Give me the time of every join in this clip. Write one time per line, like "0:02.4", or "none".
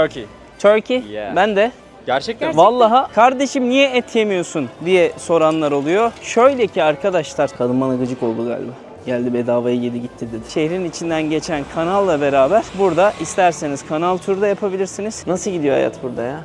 0:03.1
0:07.5
0:10.5
0:15.2